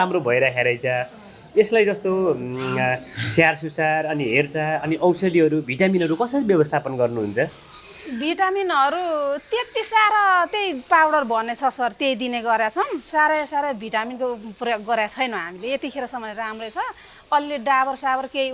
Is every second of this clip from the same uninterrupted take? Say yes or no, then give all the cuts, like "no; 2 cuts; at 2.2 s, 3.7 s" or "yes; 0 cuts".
yes; 0 cuts